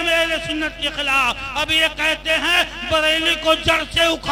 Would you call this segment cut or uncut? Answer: uncut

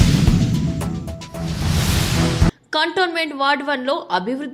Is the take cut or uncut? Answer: uncut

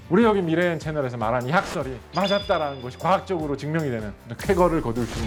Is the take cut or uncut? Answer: uncut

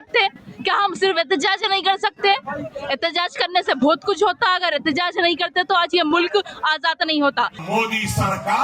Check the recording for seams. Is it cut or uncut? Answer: cut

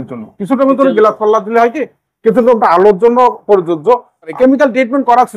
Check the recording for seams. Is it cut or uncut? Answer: cut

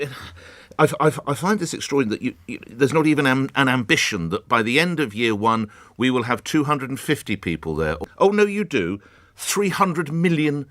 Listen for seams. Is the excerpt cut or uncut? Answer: cut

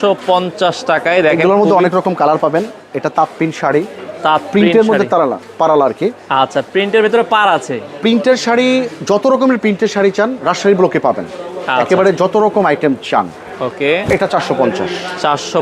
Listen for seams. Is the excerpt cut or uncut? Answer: uncut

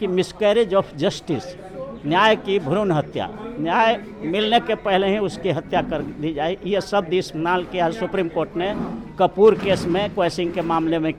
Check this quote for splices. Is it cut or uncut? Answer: uncut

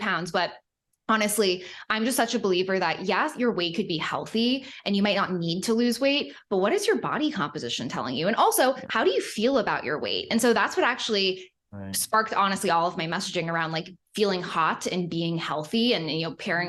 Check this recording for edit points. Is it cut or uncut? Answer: uncut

